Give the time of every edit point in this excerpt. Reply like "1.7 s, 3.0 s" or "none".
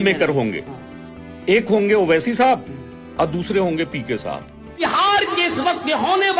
4.8 s